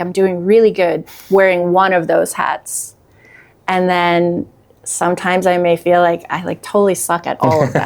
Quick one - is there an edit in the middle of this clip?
no; 0 cuts

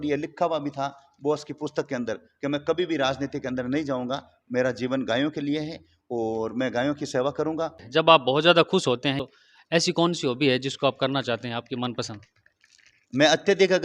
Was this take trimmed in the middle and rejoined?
yes; 2 cuts; at 7.8 s, 9.2 s

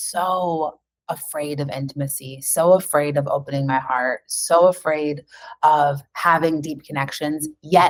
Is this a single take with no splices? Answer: yes; 0 cuts

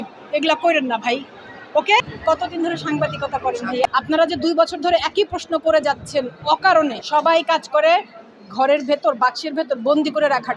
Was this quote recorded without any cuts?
no; 2 cuts; at 3.9 s, 7.0 s

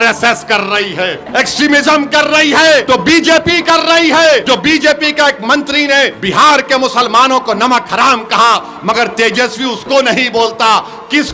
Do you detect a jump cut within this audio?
yes; 4 cuts; at 1.2 s, 2.8 s, 4.4 s, 6.2 s

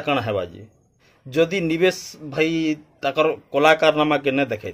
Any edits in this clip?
yes; 1 cut; at 1.1 s

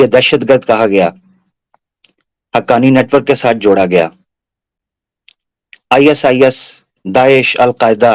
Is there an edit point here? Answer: no; 0 cuts

